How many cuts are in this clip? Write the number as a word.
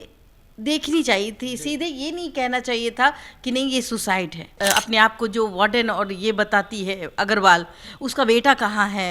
one